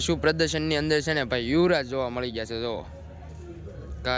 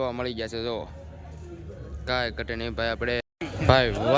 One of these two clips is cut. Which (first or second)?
second